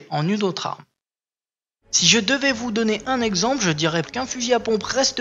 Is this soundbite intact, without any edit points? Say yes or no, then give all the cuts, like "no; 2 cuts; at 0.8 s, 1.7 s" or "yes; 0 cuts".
yes; 0 cuts